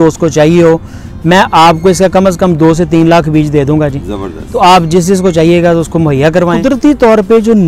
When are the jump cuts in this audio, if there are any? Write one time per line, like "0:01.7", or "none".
0:06.6